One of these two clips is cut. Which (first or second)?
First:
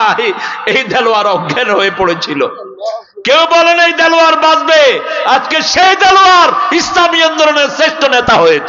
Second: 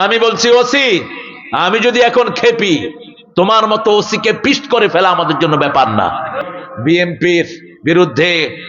second